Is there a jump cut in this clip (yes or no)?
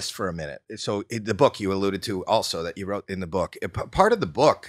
no